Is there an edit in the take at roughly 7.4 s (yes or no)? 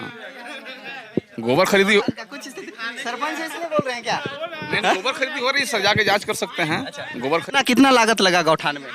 yes